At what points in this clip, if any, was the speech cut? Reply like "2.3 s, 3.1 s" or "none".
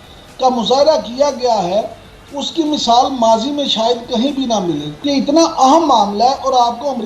4.9 s